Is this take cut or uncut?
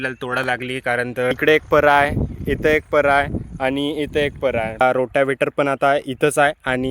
cut